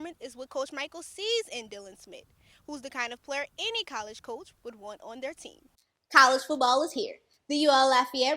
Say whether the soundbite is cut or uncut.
cut